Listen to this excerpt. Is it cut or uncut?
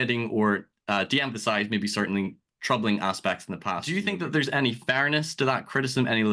cut